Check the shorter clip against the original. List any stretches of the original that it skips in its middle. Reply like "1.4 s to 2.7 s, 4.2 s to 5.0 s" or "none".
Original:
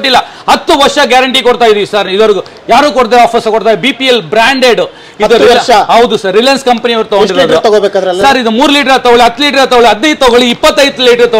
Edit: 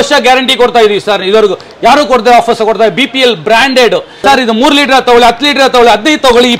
5.0 s to 8.2 s